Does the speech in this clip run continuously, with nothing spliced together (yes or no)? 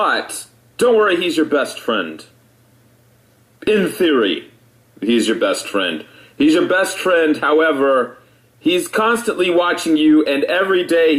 no